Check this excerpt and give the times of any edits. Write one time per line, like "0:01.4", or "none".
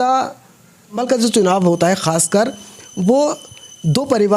0:01.0